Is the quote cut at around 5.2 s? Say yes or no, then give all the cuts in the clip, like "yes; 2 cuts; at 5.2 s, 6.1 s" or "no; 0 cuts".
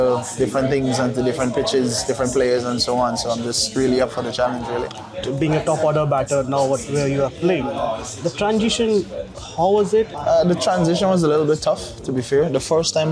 yes; 2 cuts; at 5.2 s, 10.1 s